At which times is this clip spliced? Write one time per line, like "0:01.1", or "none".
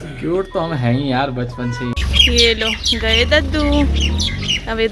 0:01.9